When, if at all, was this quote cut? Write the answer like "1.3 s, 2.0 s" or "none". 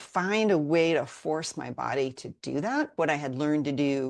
2.9 s